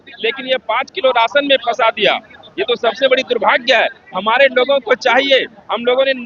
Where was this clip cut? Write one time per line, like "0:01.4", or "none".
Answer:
none